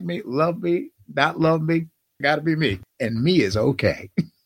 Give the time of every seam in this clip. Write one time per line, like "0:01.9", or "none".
0:02.2
0:02.9

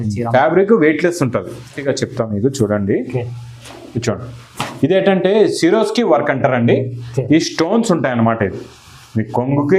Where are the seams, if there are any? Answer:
0:01.8

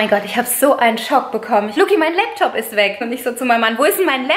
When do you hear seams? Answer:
0:01.7
0:03.1

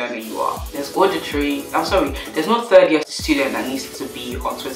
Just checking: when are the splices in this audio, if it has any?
0:01.6

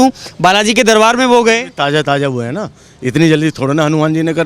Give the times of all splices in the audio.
none

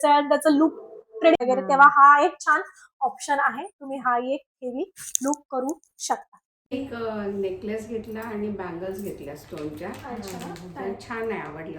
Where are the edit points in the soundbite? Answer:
0:01.4
0:06.7

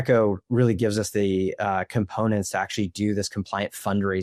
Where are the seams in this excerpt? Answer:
none

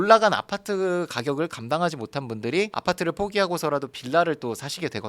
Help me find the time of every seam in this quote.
0:02.7

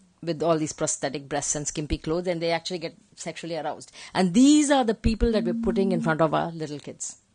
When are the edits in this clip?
none

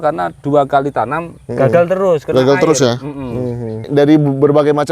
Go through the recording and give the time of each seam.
0:03.9

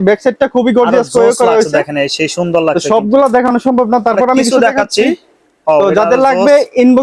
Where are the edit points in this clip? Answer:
none

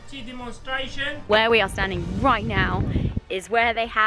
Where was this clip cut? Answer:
0:01.3

